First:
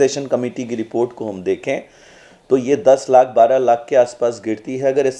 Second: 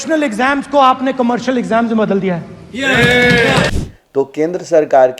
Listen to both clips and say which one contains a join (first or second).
second